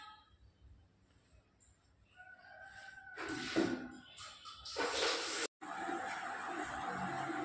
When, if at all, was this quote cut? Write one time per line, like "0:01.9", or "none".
0:05.5